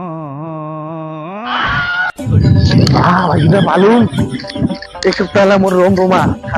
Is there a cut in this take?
no; 0 cuts

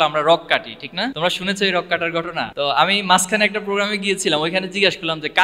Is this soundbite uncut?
no; 2 cuts; at 1.1 s, 2.5 s

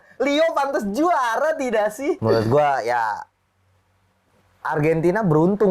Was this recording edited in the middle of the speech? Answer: yes; 1 cut; at 2.2 s

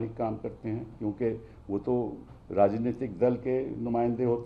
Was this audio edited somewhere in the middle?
no; 0 cuts

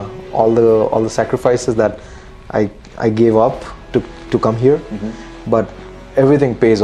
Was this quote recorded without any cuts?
yes; 0 cuts

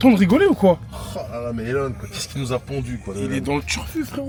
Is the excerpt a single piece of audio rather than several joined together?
yes; 0 cuts

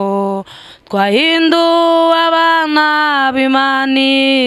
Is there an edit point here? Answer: no; 0 cuts

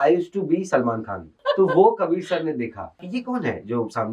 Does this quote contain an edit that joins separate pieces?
yes; 2 cuts; at 1.3 s, 3.0 s

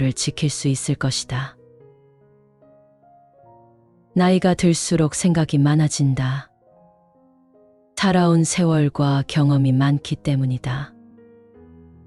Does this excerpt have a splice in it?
yes; 2 cuts; at 1.6 s, 4.1 s

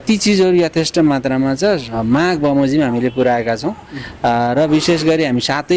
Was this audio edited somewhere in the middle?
no; 0 cuts

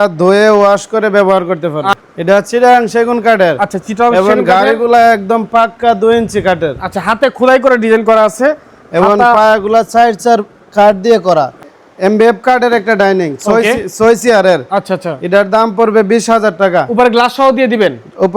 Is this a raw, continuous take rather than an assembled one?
no; 2 cuts; at 1.9 s, 11.7 s

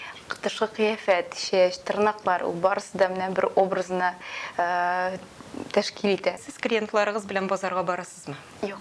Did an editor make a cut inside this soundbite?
yes; 1 cut; at 6.5 s

